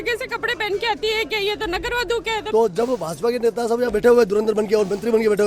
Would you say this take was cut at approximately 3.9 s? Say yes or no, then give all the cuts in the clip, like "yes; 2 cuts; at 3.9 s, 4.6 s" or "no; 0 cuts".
no; 1 cut; at 2.4 s